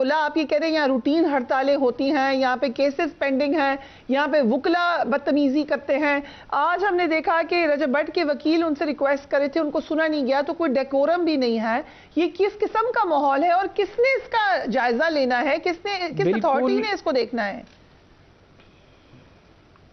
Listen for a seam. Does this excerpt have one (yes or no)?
no